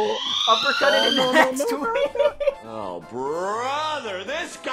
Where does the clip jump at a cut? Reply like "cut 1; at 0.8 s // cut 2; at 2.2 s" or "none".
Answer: cut 1; at 2.6 s